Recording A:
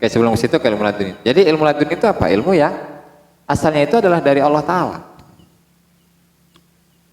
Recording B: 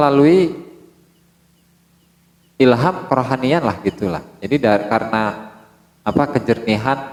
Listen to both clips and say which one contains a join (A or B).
A